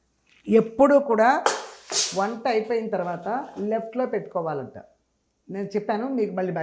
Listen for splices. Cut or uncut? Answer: uncut